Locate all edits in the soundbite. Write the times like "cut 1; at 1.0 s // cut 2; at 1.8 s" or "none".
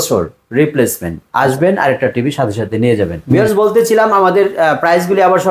cut 1; at 3.2 s